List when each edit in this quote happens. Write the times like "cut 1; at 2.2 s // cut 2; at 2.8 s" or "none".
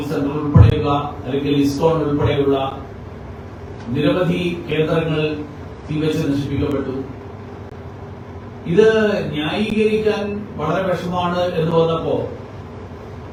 none